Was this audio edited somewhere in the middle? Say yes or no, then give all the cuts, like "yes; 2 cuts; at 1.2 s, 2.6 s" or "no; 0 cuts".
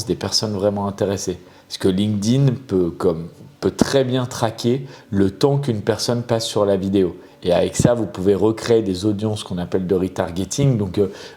no; 0 cuts